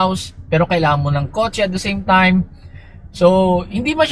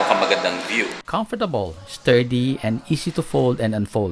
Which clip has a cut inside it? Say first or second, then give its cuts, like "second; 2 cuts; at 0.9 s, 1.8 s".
second; 1 cut; at 1.1 s